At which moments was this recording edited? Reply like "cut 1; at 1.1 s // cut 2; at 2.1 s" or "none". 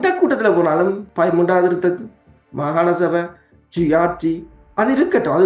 cut 1; at 1.0 s

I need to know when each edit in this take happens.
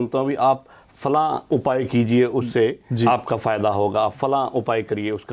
none

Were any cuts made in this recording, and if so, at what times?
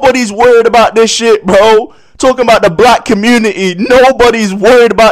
none

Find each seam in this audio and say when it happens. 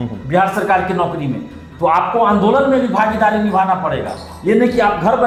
none

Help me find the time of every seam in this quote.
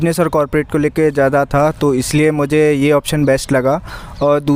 none

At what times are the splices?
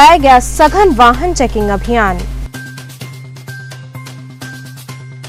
none

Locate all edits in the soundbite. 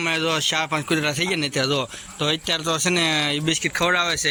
none

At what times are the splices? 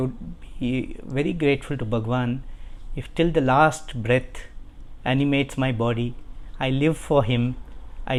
none

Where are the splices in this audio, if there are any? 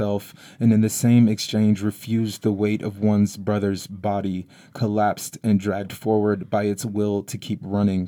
none

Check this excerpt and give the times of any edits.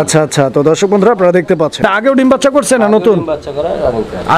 cut 1; at 1.8 s

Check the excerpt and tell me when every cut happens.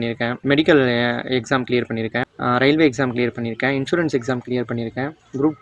none

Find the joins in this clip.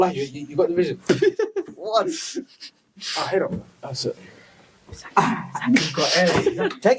none

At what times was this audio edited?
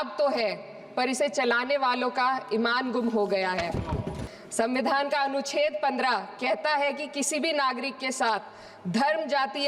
cut 1; at 4.2 s

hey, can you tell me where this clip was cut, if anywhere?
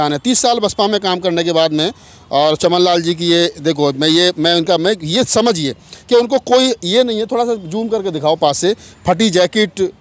none

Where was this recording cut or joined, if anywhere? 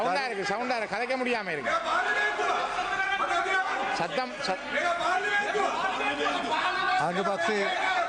none

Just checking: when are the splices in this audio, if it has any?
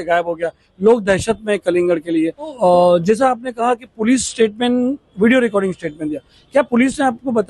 cut 1; at 2.5 s

